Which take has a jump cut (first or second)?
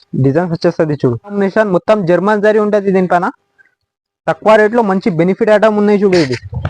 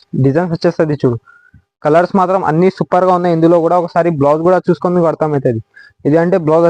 first